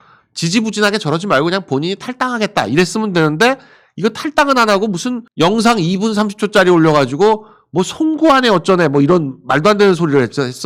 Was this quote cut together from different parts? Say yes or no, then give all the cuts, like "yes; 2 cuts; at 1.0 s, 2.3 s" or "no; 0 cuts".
no; 0 cuts